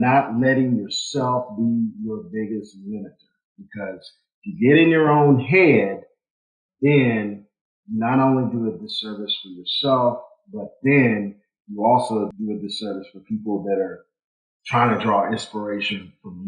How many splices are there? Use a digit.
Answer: 1